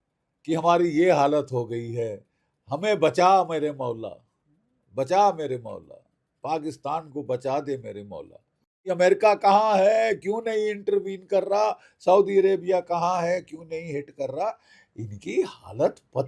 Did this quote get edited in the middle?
yes; 1 cut; at 8.8 s

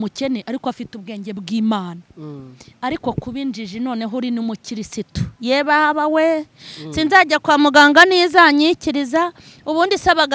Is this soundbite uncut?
yes; 0 cuts

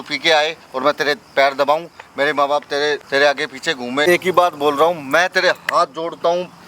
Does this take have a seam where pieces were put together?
yes; 2 cuts; at 3.0 s, 4.0 s

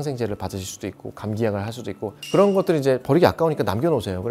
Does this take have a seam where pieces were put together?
no; 0 cuts

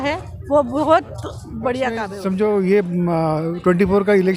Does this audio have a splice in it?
yes; 1 cut; at 2.1 s

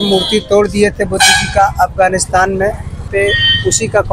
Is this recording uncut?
no; 1 cut; at 3.1 s

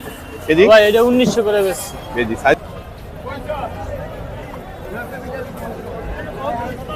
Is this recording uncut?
no; 1 cut; at 2.6 s

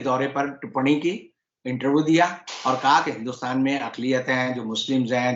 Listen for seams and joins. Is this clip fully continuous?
yes; 0 cuts

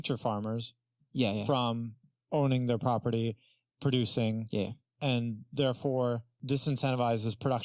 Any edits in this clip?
no; 0 cuts

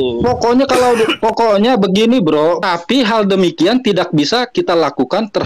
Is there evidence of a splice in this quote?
yes; 1 cut; at 2.6 s

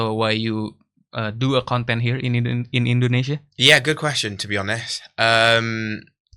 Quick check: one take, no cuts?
yes; 0 cuts

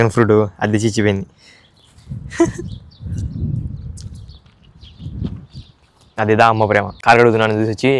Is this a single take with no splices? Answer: no; 1 cut; at 6.9 s

